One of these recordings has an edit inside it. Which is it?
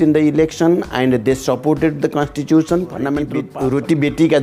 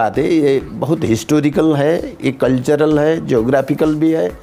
first; 1 cut; at 3.5 s

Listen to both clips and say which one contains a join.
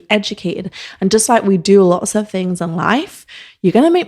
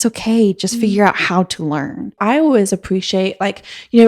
second; 1 cut; at 2.1 s

